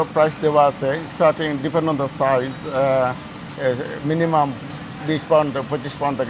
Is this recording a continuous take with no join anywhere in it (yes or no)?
yes